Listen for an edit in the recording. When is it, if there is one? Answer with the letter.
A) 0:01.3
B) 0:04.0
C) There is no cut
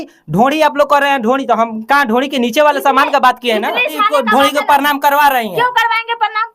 B